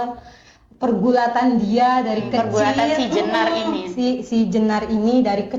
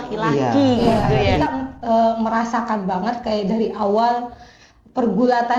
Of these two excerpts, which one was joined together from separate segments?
second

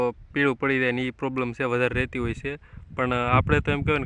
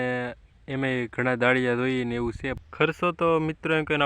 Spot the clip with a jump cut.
second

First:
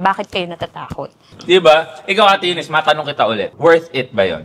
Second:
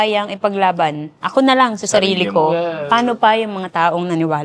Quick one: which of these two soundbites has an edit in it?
first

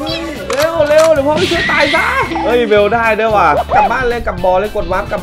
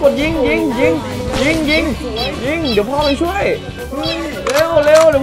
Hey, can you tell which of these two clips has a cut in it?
first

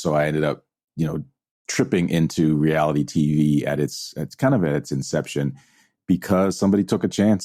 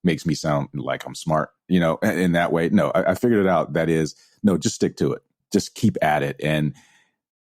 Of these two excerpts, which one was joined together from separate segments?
second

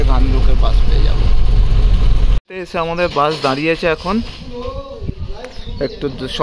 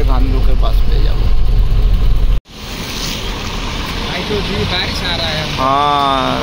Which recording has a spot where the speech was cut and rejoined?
first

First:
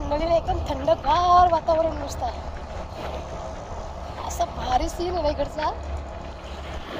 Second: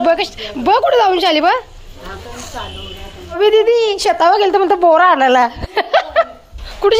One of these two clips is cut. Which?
second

